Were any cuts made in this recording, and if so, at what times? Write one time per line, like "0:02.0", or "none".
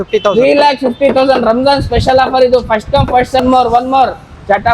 0:03.4